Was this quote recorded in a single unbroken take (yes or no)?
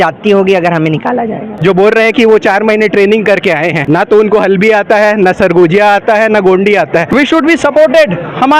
no